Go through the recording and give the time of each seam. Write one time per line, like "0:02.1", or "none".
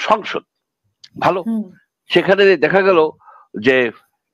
none